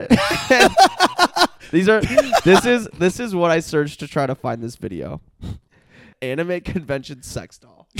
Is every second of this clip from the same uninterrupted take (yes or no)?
no